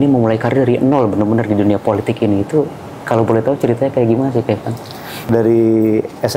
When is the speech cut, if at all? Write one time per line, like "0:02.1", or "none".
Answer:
0:05.3

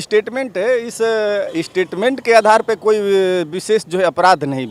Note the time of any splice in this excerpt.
none

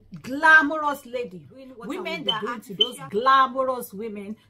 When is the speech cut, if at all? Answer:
0:02.9

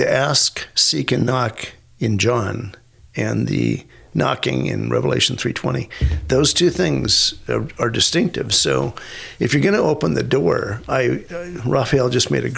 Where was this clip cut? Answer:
none

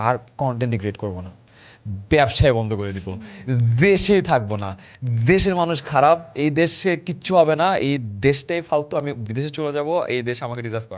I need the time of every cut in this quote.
none

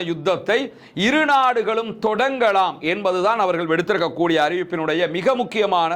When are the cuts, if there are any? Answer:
none

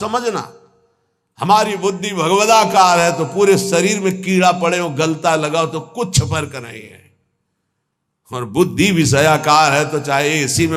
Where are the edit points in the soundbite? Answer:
none

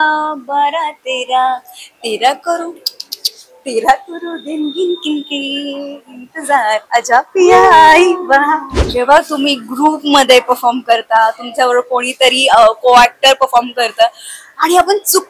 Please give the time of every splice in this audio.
0:08.8

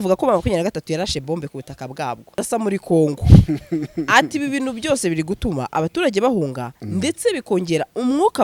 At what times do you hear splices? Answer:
none

